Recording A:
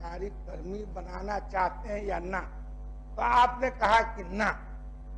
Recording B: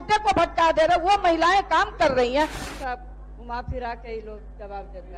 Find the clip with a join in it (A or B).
B